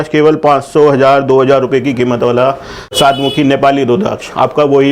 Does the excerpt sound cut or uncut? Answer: cut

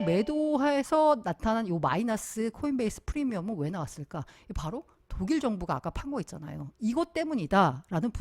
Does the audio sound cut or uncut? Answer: uncut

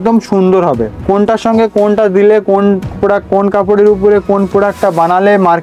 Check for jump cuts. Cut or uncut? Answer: cut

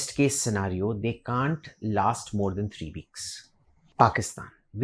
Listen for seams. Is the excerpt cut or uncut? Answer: cut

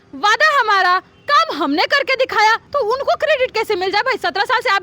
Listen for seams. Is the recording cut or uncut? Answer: cut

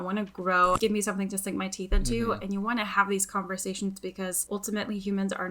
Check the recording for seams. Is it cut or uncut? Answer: cut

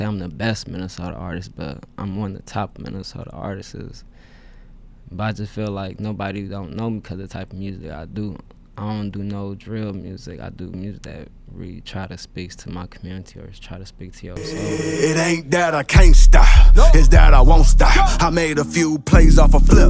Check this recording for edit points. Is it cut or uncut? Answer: cut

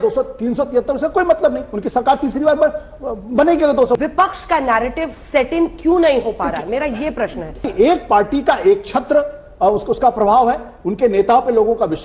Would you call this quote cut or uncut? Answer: cut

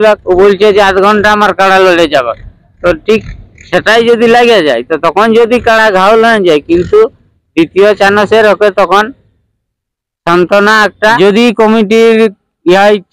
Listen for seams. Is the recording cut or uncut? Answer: cut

